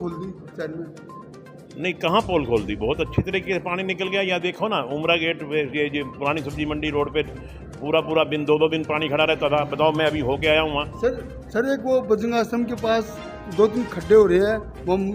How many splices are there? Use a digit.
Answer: 0